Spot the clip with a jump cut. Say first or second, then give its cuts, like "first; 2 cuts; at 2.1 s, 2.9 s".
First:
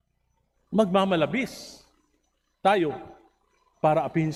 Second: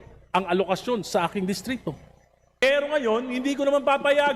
second; 1 cut; at 2.6 s